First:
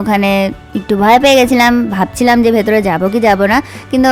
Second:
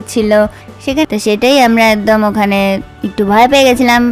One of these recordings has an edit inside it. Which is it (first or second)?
second